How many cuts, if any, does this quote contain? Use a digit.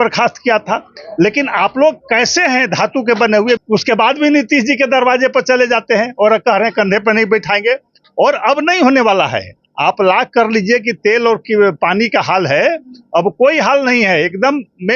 1